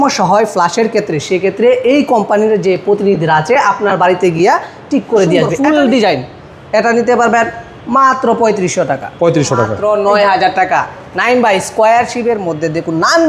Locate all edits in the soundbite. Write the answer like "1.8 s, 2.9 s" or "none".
5.5 s, 9.7 s